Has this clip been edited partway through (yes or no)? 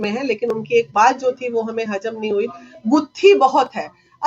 no